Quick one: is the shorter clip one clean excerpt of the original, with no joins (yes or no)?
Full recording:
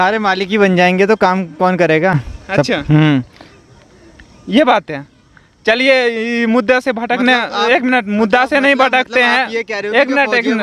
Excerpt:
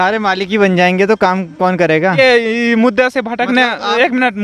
no